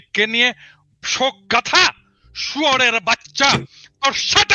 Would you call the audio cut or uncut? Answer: uncut